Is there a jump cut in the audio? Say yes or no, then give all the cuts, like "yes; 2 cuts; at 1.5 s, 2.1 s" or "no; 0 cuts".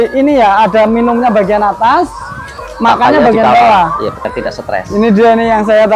yes; 1 cut; at 4.2 s